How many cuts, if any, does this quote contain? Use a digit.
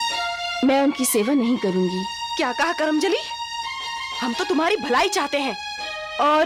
0